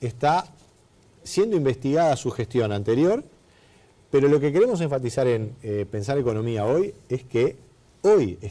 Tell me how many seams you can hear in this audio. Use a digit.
1